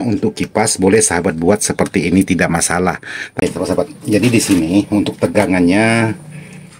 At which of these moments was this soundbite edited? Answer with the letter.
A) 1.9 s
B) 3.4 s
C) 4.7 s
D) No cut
B